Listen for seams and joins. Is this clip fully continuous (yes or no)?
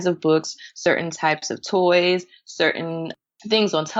yes